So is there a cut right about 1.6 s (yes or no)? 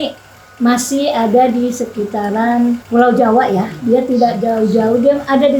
no